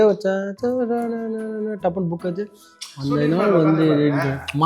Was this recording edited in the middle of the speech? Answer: no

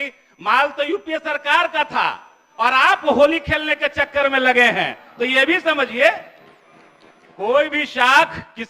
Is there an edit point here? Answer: no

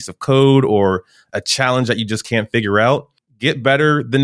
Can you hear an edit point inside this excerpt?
yes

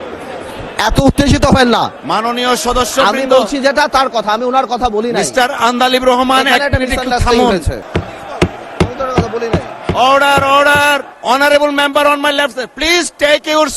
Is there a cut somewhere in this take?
yes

